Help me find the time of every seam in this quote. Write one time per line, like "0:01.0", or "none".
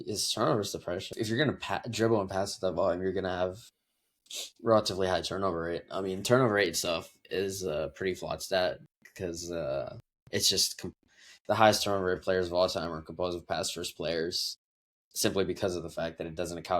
0:01.1